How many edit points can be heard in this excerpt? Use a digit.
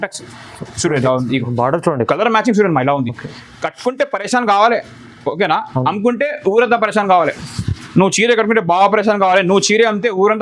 0